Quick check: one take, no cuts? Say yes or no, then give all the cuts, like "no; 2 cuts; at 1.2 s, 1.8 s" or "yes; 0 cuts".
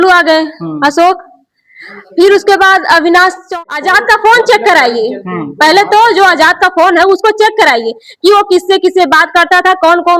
no; 1 cut; at 3.5 s